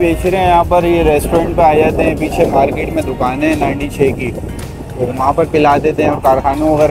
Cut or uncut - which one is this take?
uncut